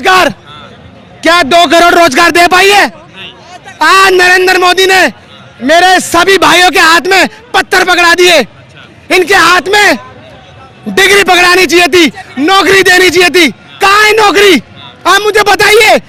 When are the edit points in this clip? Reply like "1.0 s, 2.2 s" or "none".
none